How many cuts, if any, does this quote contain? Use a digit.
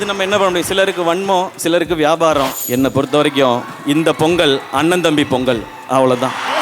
1